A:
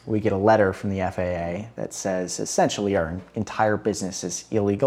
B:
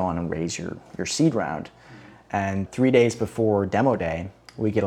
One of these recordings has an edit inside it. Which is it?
B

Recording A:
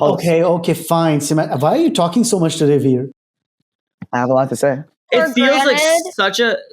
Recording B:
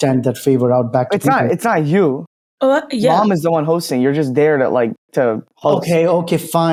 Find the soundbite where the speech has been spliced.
A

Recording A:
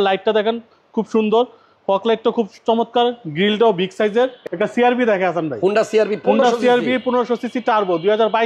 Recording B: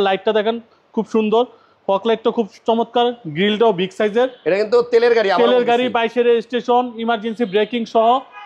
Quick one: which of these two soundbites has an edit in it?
A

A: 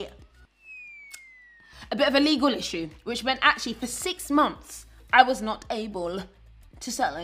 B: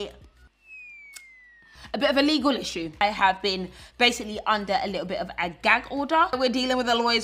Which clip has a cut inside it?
B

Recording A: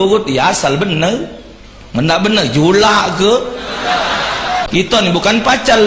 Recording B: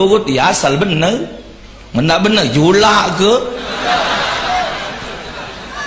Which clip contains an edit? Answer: A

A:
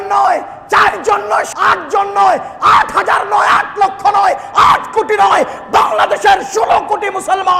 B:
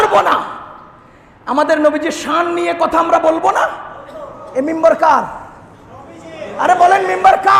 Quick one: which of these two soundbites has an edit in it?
A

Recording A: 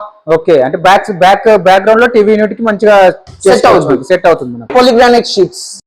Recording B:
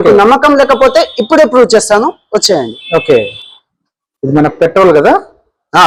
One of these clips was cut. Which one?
A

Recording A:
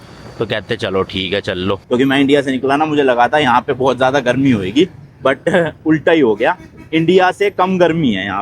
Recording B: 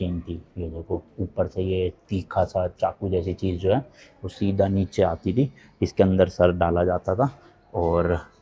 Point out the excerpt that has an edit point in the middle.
A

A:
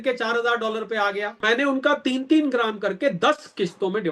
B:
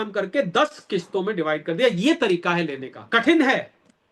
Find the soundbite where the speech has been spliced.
A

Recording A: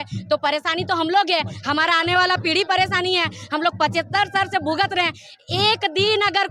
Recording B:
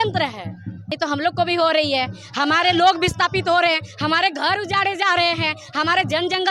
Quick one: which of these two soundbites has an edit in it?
B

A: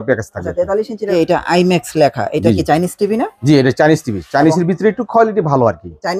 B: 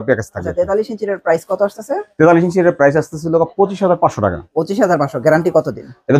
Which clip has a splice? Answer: A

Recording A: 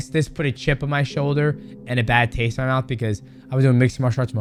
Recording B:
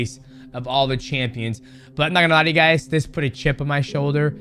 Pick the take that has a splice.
B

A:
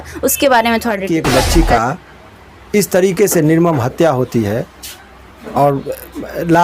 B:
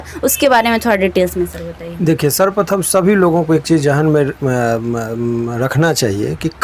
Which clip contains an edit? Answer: A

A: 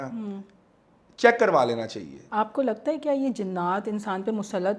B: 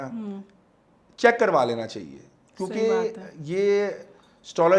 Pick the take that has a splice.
A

